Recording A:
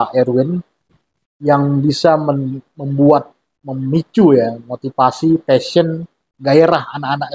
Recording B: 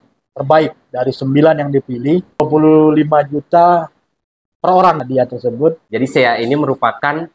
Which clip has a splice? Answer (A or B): B